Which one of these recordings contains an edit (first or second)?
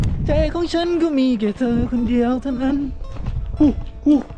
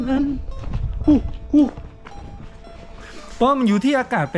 second